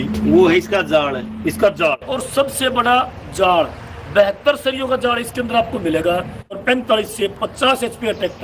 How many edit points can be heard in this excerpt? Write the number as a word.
two